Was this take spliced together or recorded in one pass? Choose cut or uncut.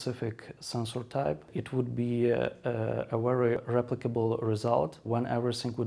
uncut